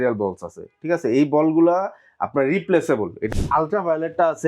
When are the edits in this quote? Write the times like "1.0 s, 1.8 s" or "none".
3.2 s